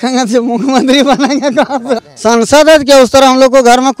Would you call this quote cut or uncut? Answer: cut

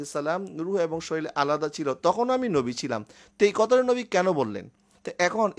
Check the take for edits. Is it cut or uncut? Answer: uncut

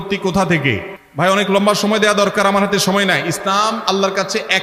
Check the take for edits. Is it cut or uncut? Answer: uncut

